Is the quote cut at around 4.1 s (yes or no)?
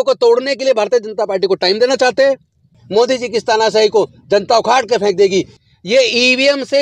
no